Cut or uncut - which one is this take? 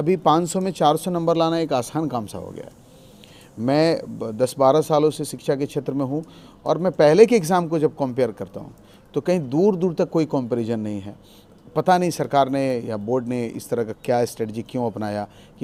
uncut